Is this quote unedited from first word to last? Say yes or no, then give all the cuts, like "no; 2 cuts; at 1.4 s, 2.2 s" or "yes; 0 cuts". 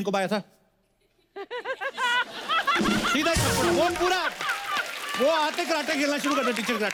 yes; 0 cuts